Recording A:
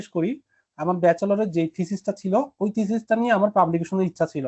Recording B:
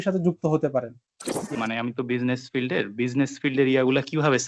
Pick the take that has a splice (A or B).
B